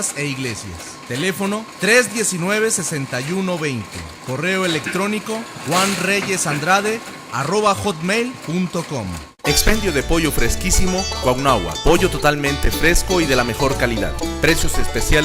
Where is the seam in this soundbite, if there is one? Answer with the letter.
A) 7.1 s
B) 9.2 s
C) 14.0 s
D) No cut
B